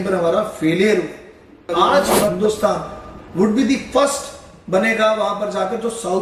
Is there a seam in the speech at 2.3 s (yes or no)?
yes